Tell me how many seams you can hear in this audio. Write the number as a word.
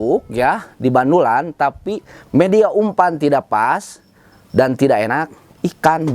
zero